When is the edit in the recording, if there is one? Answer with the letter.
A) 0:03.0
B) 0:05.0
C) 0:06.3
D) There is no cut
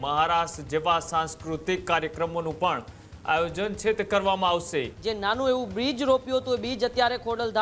B